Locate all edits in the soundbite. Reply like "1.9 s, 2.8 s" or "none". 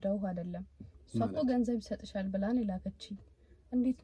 none